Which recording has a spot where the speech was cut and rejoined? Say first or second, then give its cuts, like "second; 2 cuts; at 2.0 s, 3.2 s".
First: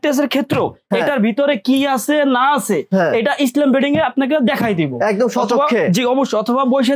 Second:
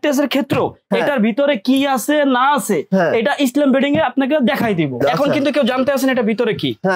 second; 1 cut; at 5.0 s